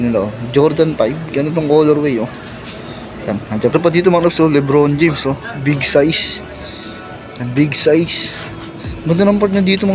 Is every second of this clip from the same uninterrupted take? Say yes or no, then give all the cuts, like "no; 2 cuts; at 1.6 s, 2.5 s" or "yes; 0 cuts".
no; 1 cut; at 3.7 s